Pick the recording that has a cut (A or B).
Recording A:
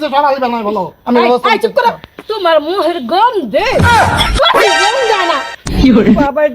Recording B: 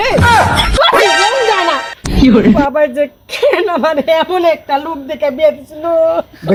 A